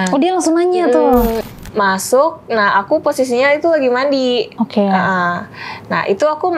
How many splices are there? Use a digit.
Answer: 1